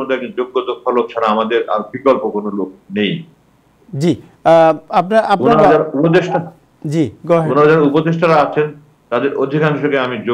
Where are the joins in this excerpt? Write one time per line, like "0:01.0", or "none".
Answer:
none